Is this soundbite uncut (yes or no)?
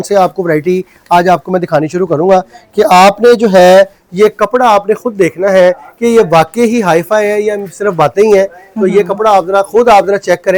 yes